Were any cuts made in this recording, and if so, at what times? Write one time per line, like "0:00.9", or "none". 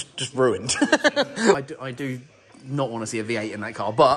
0:01.6